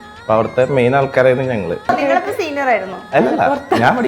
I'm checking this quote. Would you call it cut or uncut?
cut